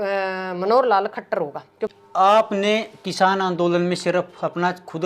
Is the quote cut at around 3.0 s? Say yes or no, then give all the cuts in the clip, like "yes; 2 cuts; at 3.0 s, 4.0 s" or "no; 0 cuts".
no; 1 cut; at 1.8 s